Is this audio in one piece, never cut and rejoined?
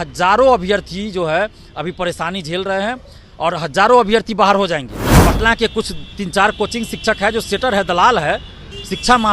no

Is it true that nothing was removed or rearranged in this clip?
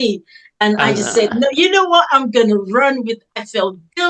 yes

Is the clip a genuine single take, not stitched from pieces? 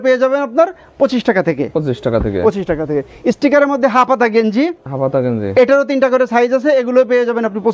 yes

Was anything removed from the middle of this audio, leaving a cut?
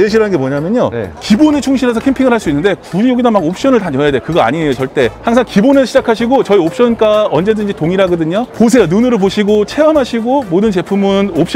no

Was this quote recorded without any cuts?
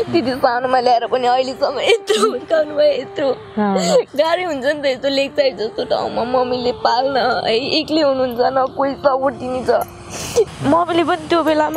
no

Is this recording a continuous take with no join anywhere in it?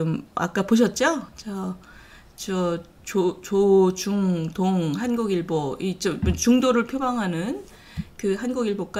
yes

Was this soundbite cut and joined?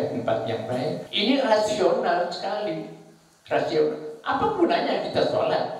yes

